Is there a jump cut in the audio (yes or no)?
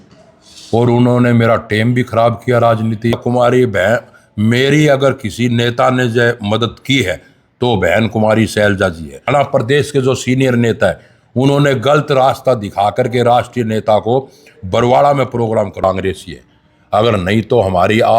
yes